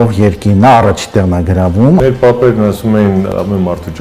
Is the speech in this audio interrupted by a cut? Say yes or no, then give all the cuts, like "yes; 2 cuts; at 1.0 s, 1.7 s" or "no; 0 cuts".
yes; 2 cuts; at 2.0 s, 3.3 s